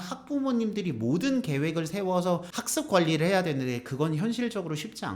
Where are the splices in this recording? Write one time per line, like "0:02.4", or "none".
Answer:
0:02.6